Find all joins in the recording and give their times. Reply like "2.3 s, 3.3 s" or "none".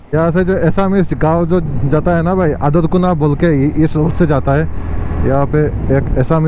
none